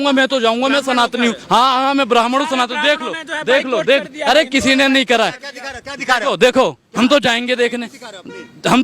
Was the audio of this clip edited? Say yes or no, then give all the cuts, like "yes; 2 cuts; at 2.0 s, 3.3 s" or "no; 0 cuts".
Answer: yes; 1 cut; at 1.4 s